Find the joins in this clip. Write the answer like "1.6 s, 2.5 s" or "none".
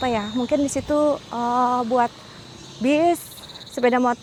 none